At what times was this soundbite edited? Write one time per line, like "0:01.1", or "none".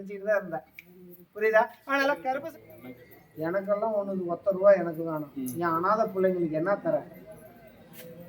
0:02.4